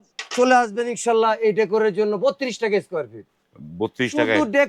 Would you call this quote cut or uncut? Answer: uncut